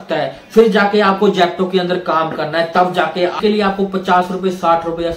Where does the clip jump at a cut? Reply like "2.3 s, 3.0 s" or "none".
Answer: 3.4 s